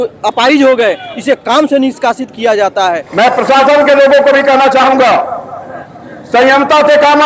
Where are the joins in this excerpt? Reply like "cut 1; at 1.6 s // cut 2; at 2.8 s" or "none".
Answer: cut 1; at 3.1 s